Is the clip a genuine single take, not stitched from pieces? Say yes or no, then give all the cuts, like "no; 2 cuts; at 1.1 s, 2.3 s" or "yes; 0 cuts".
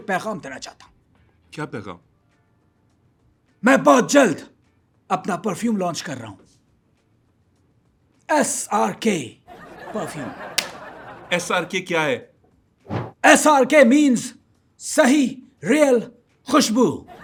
yes; 0 cuts